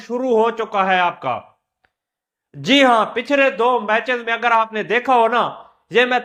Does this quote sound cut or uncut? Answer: uncut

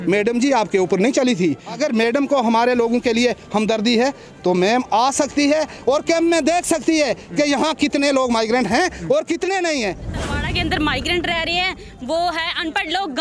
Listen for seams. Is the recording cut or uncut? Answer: cut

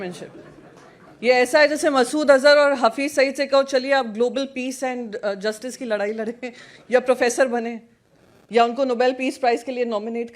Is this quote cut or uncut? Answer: uncut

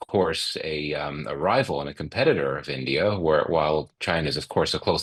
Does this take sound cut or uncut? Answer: uncut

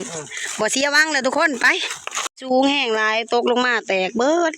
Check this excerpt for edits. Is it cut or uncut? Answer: cut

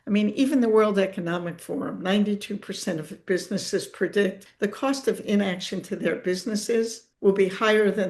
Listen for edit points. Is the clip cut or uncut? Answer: cut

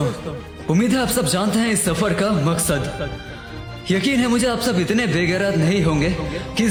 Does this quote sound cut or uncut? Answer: uncut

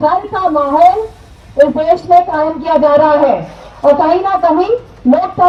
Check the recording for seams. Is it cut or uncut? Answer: uncut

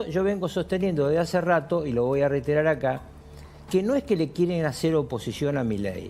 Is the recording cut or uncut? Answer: uncut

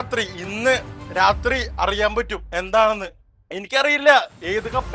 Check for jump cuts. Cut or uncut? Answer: uncut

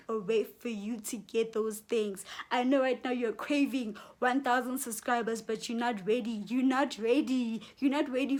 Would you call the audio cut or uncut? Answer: uncut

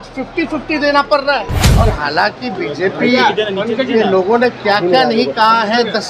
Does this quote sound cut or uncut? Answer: cut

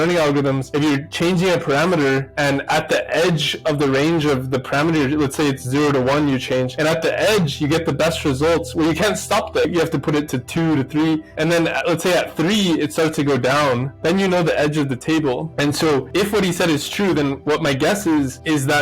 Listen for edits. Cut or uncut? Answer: cut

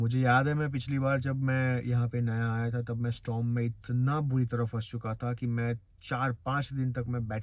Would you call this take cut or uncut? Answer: uncut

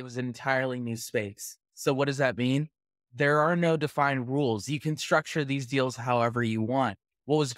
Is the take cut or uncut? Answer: uncut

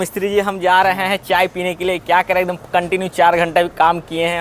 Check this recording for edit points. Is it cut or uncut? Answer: uncut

